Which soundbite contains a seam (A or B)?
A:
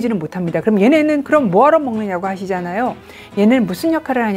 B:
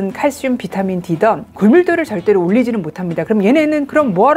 B